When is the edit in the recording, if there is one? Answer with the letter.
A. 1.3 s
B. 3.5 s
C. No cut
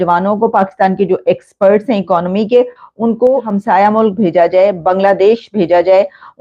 B